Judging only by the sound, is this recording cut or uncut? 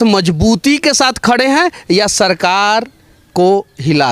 uncut